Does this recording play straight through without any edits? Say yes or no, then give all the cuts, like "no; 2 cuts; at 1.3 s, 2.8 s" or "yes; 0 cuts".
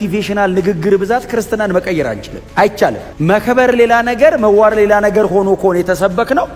yes; 0 cuts